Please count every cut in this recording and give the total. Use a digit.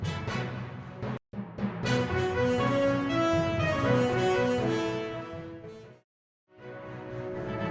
1